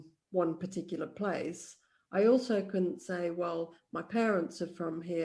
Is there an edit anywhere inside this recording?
no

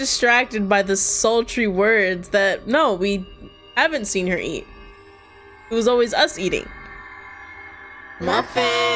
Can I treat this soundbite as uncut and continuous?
yes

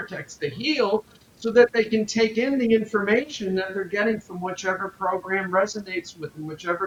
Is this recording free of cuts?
yes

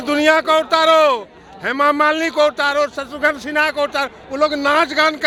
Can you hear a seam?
no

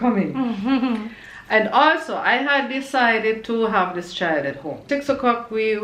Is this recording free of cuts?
no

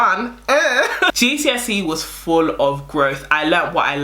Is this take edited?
yes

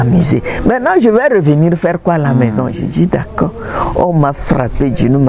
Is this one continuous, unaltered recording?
yes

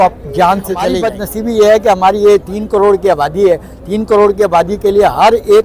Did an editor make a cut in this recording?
yes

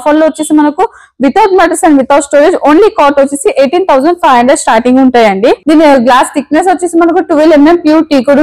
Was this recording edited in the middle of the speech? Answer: yes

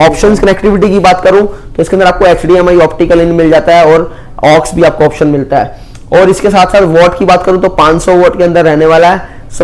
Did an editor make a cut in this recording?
no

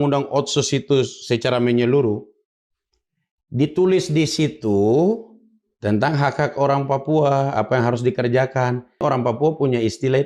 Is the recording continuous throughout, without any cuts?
no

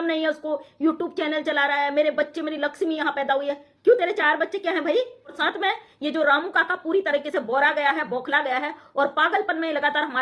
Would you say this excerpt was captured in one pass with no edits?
no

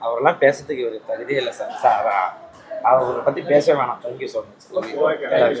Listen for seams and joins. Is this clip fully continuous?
yes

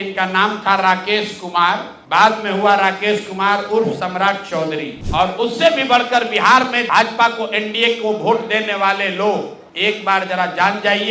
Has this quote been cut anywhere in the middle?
yes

